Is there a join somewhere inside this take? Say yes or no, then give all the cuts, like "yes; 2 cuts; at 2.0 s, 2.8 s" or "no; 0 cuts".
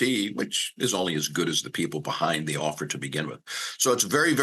no; 0 cuts